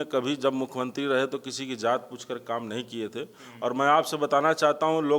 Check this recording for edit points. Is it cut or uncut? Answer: uncut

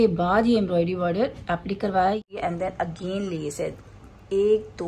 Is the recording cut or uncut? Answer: cut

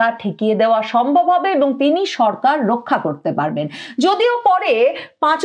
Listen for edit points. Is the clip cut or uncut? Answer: uncut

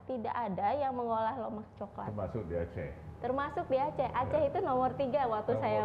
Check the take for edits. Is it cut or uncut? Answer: uncut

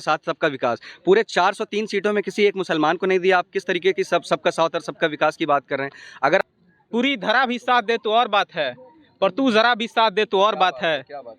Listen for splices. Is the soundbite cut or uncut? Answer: cut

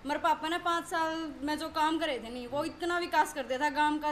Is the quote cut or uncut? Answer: uncut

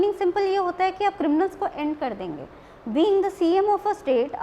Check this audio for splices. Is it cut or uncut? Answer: uncut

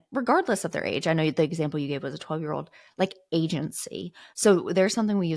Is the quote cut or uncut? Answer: uncut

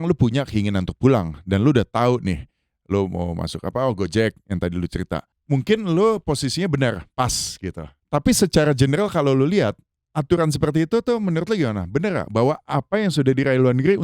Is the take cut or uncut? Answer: cut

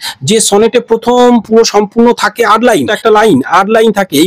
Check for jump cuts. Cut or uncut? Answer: cut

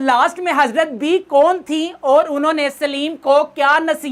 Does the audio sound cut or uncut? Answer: uncut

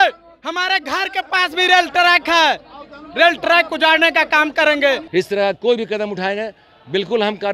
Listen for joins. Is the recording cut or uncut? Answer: cut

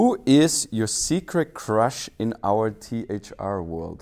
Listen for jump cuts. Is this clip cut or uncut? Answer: uncut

